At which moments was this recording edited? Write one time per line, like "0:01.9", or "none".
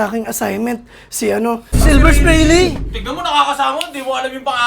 0:01.7